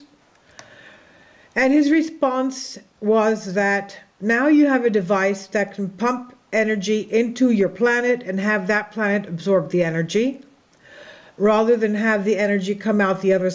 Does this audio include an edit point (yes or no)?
no